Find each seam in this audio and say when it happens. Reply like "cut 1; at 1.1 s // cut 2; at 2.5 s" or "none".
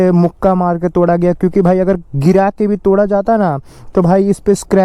none